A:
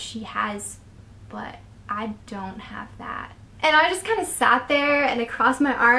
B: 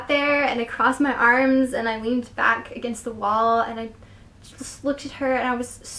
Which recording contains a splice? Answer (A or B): A